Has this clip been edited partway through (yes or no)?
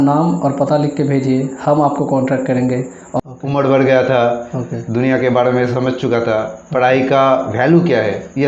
yes